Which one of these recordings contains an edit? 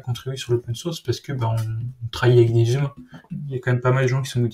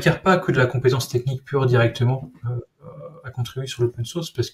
first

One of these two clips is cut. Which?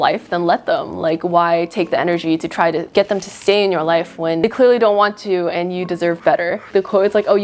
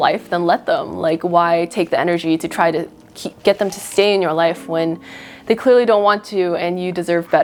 first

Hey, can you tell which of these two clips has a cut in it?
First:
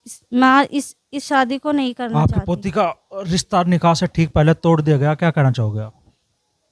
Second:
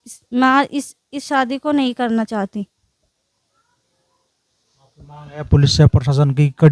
first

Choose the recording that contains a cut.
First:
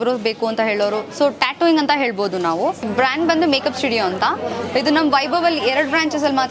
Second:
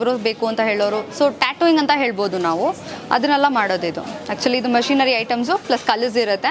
first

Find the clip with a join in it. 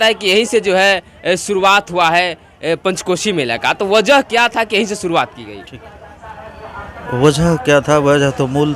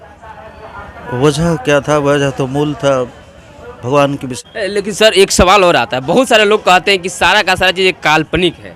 second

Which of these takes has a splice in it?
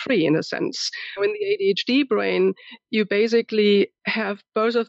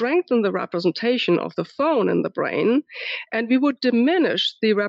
first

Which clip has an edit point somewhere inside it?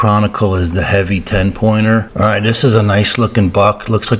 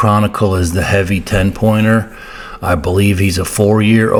first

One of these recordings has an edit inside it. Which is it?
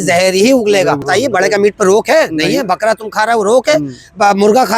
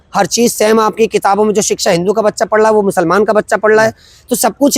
first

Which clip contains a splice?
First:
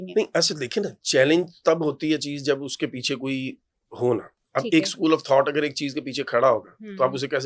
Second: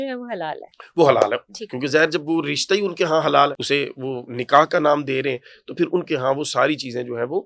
second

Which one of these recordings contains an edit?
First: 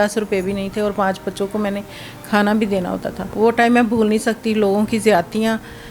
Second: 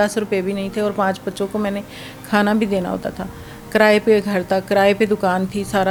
first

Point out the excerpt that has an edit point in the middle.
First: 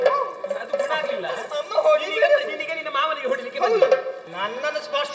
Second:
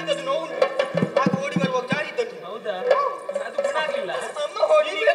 first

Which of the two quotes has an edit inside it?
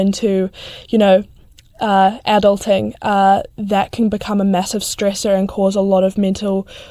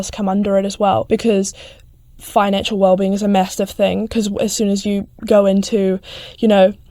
second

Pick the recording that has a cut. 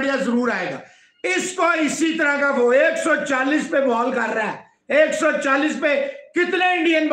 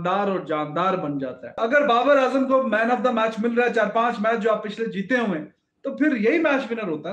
second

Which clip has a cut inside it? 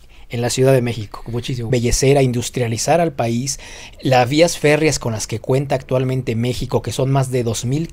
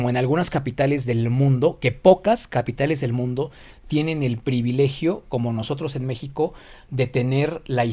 first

